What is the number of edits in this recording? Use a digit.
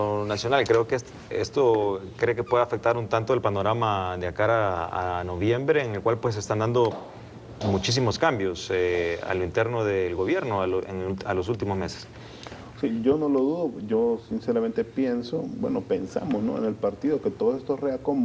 0